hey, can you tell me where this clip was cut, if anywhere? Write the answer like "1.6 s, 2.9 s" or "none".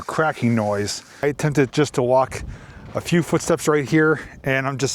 1.2 s